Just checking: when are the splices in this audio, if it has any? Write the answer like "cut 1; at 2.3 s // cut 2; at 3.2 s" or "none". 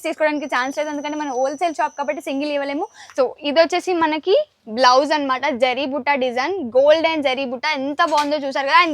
cut 1; at 3.2 s